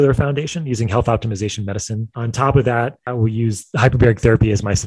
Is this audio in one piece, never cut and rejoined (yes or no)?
no